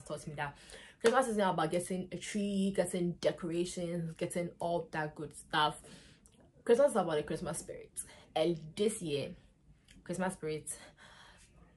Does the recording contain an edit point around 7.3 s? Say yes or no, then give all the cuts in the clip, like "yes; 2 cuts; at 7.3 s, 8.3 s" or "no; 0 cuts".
no; 0 cuts